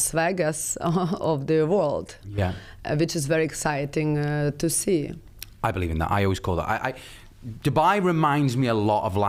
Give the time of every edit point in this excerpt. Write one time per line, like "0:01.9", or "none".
none